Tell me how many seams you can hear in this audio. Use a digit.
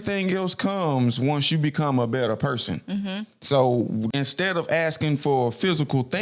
1